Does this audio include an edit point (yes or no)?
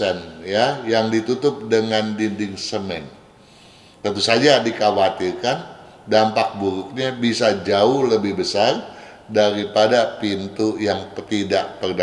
no